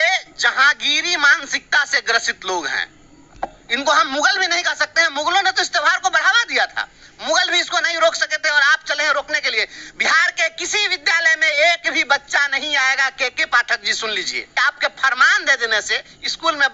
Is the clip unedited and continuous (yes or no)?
yes